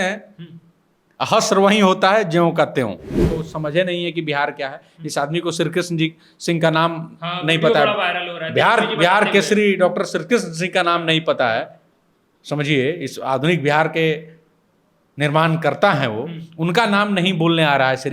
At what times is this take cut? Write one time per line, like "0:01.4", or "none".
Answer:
0:03.2